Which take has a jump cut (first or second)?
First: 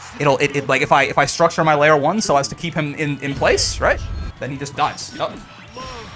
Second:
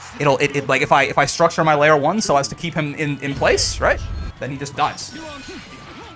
first